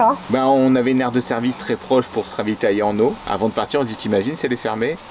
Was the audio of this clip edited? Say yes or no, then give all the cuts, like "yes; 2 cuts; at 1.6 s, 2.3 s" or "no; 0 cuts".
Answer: no; 0 cuts